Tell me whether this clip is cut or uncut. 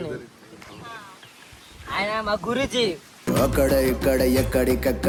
uncut